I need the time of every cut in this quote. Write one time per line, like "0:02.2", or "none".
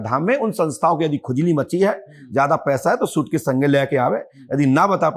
none